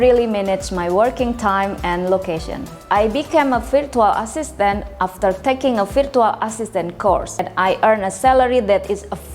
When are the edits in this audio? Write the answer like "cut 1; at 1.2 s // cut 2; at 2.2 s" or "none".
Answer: cut 1; at 2.7 s // cut 2; at 7.5 s